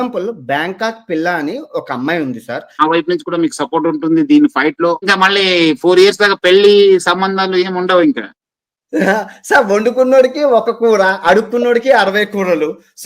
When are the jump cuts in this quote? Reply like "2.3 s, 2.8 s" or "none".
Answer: 2.8 s, 5.1 s